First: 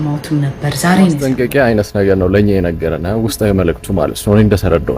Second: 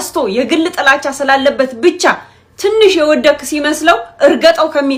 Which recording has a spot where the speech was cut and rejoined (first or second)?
first